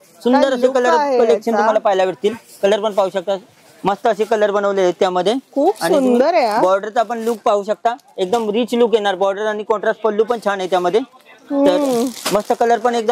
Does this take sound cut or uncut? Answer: uncut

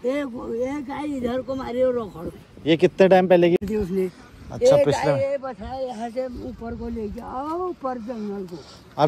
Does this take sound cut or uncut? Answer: uncut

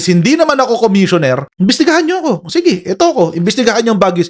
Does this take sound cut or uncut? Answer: cut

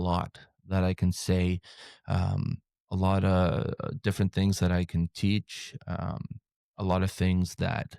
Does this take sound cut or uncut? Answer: uncut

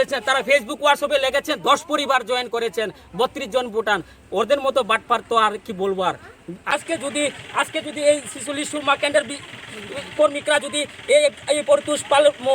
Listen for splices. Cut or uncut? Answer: cut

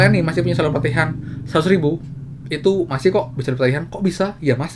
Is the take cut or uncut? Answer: uncut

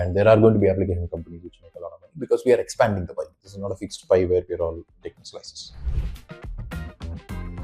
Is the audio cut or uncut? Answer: cut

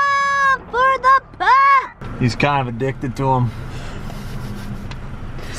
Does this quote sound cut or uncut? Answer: uncut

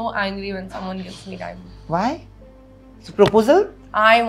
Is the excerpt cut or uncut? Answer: uncut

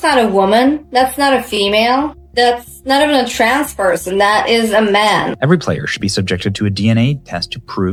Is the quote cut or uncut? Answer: uncut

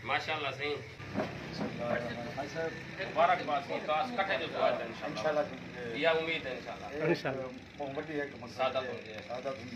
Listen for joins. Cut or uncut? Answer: cut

